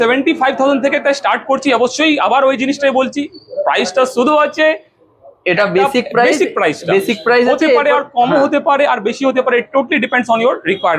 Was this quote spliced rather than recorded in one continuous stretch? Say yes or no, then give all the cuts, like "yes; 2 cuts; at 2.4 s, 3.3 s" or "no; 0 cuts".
no; 0 cuts